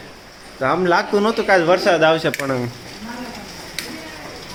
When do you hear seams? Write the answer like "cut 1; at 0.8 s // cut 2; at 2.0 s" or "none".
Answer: none